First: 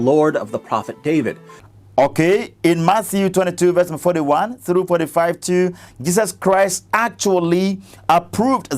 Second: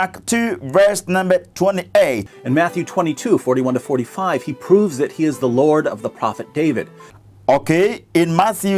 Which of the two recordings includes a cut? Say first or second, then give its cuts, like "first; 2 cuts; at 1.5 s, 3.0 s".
second; 1 cut; at 2.3 s